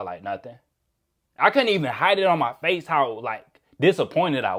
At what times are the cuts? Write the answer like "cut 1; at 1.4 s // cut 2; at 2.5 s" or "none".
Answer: none

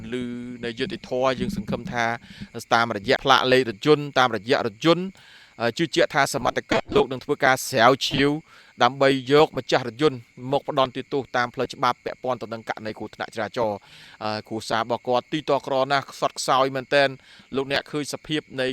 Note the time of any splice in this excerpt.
cut 1; at 3.2 s

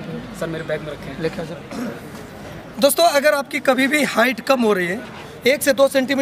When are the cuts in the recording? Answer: cut 1; at 1.5 s // cut 2; at 2.6 s // cut 3; at 5.3 s

